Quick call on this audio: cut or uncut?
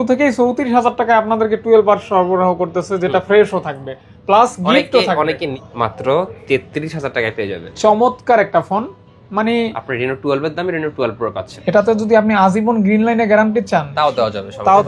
cut